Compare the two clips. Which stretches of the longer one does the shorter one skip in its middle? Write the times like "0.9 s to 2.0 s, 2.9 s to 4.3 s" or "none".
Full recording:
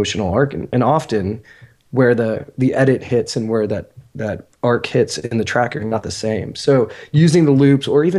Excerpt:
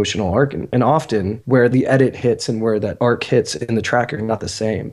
1.6 s to 2.5 s, 3.8 s to 4.5 s